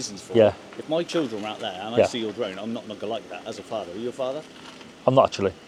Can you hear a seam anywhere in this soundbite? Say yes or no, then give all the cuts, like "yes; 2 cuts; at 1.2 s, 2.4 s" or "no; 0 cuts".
no; 0 cuts